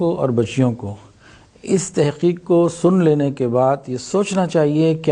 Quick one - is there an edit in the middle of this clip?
no; 0 cuts

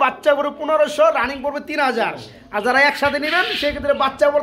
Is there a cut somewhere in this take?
no; 0 cuts

